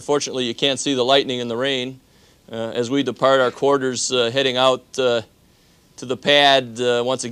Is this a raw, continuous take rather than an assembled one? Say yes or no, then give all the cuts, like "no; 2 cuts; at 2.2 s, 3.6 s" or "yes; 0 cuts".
yes; 0 cuts